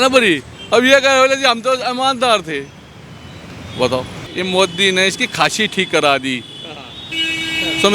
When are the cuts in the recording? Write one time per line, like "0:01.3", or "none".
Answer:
0:04.2